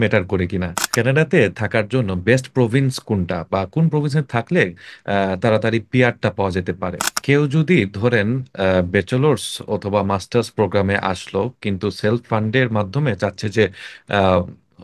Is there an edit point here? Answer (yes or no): yes